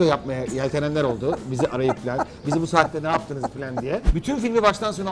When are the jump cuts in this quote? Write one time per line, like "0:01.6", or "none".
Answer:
0:04.0